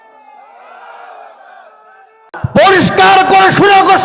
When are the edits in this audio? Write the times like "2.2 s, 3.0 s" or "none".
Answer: 2.3 s